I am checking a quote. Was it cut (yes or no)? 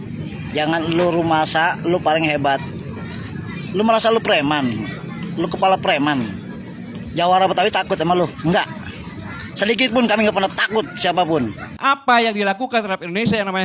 yes